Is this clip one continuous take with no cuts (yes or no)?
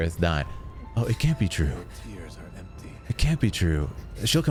yes